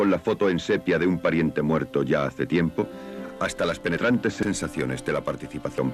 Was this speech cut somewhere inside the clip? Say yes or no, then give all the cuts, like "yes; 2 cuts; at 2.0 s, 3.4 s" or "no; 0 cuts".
yes; 1 cut; at 4.2 s